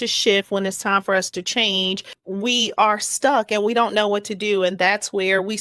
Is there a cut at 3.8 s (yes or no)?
no